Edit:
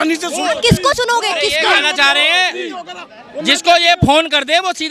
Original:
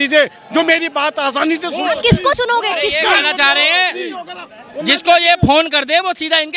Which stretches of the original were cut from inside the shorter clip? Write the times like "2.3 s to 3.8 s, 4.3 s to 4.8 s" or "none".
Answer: none